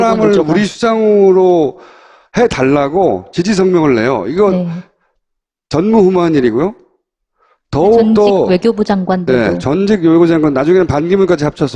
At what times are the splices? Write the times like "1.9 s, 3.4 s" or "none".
9.8 s